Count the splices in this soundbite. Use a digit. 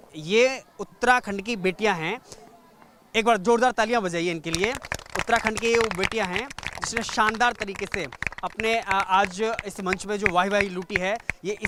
0